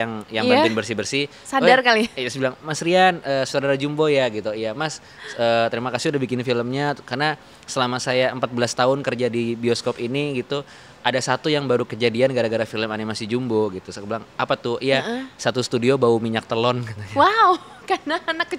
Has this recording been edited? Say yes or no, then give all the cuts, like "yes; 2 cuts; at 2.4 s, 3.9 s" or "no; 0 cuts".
no; 0 cuts